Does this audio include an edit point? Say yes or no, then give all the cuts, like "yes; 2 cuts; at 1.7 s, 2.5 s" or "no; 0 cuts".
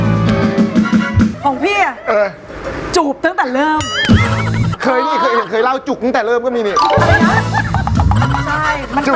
yes; 2 cuts; at 1.4 s, 4.7 s